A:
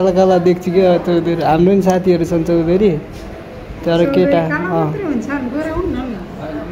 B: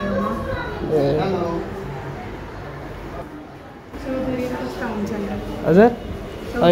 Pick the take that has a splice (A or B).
B